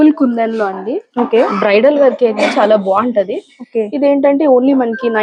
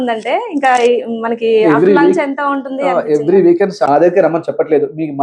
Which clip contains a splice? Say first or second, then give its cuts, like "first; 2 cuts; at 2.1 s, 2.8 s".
second; 1 cut; at 3.7 s